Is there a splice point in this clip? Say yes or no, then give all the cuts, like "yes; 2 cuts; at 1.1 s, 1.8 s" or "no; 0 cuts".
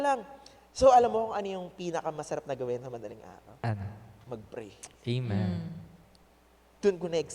no; 0 cuts